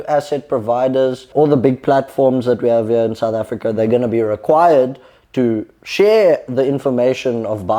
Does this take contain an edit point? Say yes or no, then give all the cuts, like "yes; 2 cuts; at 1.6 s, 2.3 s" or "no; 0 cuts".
no; 0 cuts